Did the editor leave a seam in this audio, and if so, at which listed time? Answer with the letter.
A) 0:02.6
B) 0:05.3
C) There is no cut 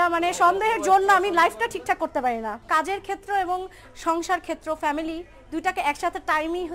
A